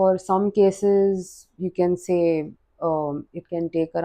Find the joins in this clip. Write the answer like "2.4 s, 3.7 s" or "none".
none